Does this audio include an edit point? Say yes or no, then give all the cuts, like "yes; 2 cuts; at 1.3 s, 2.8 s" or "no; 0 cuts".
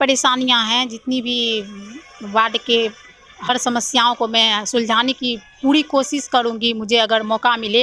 no; 0 cuts